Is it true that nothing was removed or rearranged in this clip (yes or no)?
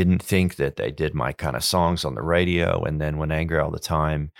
yes